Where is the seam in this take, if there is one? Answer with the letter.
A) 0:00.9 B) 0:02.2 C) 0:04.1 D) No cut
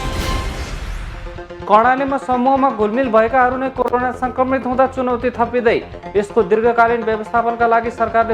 A